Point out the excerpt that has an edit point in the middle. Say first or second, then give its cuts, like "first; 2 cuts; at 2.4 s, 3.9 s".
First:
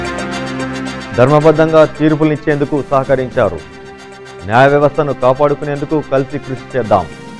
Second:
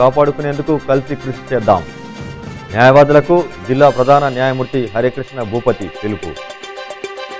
first; 1 cut; at 1.0 s